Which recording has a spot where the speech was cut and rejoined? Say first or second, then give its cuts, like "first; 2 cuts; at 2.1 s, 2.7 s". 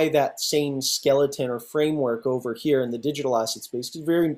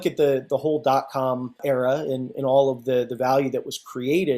second; 1 cut; at 1.6 s